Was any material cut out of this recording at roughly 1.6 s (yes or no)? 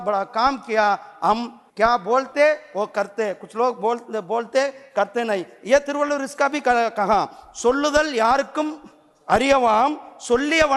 yes